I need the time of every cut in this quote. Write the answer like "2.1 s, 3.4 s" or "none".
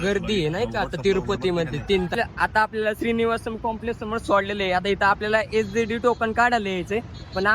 2.1 s